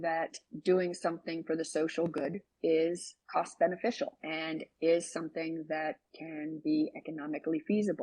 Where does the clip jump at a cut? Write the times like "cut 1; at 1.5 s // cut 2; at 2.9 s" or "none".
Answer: cut 1; at 3.1 s // cut 2; at 4.2 s